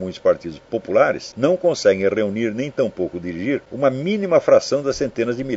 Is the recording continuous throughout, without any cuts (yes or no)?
no